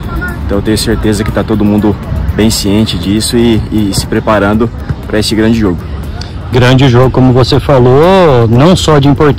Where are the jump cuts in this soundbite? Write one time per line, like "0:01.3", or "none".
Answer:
none